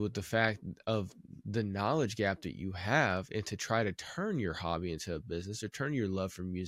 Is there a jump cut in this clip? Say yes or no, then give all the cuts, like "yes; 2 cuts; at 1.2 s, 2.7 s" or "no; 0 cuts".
no; 0 cuts